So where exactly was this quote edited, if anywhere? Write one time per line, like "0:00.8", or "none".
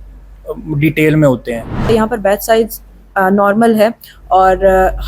0:01.8